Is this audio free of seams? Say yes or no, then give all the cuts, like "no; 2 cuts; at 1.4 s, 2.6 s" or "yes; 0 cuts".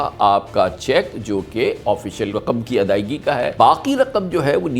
no; 2 cuts; at 2.3 s, 3.5 s